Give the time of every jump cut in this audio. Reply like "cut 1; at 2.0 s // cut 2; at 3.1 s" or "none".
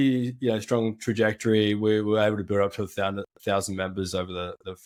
none